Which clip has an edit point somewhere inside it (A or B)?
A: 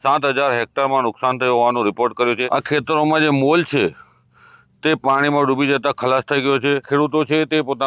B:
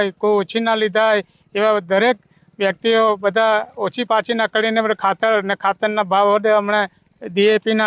A